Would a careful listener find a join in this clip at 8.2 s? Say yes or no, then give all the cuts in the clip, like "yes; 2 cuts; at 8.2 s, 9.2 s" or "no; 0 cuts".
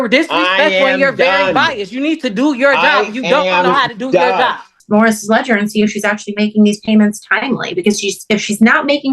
no; 1 cut; at 4.8 s